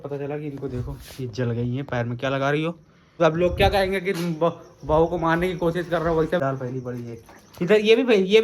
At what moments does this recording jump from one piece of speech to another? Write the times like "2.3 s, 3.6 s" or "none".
3.2 s, 6.4 s

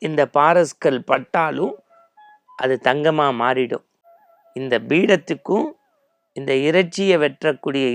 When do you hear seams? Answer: none

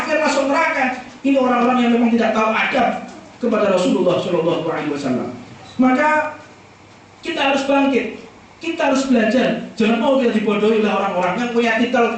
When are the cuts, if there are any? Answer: none

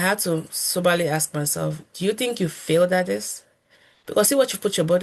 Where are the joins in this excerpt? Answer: none

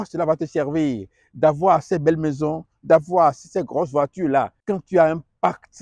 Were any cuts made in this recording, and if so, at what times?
4.6 s

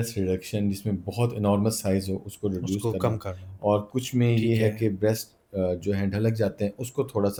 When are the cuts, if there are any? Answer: none

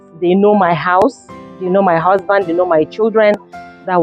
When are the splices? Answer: none

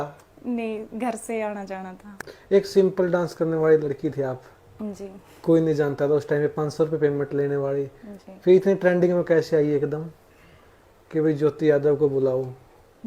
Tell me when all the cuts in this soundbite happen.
2.3 s

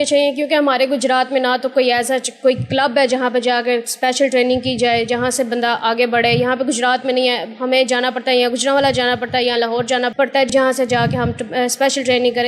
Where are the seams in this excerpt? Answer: none

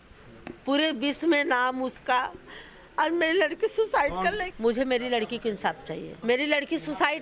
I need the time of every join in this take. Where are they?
4.4 s, 6.1 s

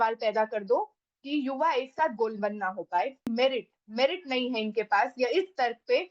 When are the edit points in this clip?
3.3 s

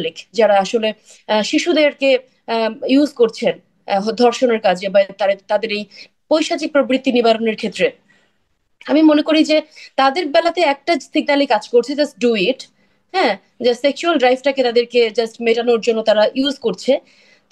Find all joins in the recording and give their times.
none

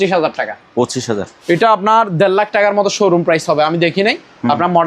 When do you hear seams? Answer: 1.3 s

